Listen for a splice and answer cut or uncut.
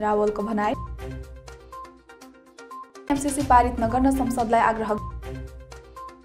uncut